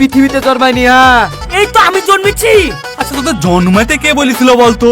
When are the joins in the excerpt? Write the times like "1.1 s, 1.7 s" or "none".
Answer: 1.4 s